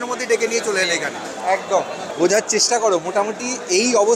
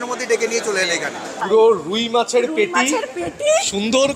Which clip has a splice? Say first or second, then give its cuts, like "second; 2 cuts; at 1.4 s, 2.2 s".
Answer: second; 1 cut; at 1.3 s